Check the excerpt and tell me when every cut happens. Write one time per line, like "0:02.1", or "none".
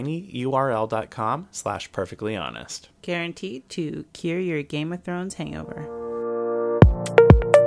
0:05.9